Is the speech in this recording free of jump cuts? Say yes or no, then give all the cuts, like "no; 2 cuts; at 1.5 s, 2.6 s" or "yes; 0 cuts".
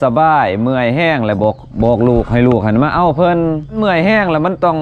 no; 1 cut; at 3.8 s